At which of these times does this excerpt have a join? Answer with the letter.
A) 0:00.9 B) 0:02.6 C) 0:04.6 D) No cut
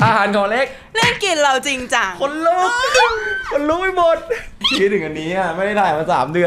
C